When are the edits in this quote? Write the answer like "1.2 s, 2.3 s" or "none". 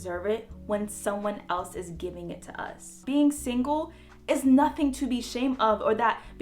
3.0 s

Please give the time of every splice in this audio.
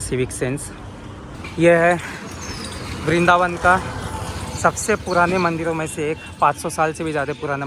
1.3 s

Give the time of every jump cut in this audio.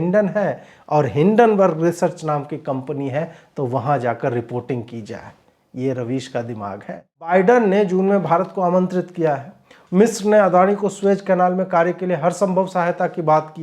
7.3 s

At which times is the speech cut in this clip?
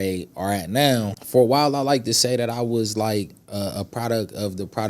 1.2 s

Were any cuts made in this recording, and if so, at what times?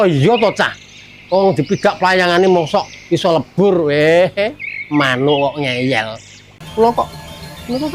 6.6 s

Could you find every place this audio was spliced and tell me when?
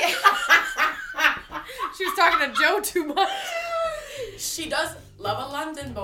5.1 s

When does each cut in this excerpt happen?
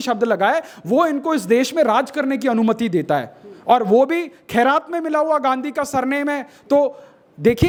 none

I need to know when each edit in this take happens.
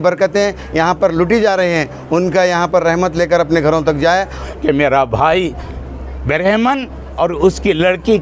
4.4 s

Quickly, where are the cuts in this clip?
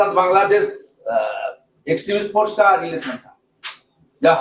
2.8 s

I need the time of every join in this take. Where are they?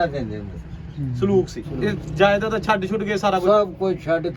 1.7 s

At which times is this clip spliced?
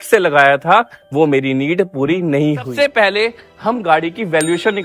2.7 s

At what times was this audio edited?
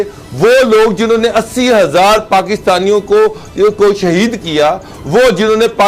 none

